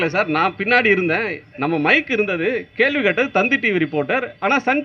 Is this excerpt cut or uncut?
cut